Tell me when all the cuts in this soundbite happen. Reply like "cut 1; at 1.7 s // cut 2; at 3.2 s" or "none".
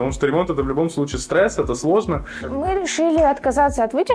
cut 1; at 2.5 s